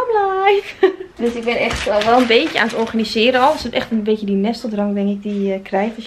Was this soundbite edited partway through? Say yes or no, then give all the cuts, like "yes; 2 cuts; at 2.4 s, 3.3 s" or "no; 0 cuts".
no; 0 cuts